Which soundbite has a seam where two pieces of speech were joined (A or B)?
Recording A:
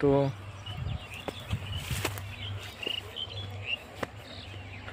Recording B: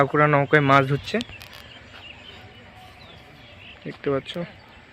B